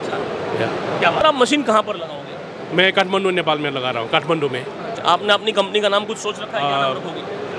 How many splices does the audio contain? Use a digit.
2